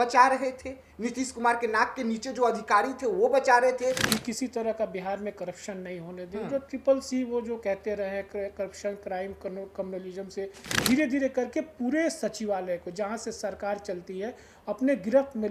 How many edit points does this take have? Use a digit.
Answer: 2